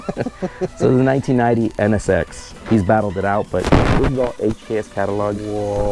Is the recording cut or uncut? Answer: cut